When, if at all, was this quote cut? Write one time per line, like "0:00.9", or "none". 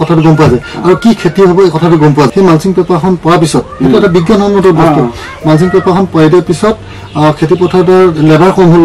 0:02.3

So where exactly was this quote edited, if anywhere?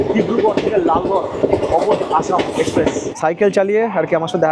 0:03.1

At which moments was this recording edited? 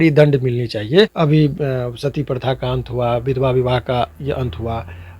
0:01.1

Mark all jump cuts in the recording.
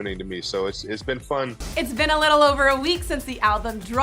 0:01.7

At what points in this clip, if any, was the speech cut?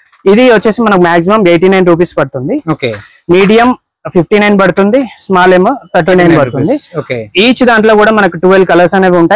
none

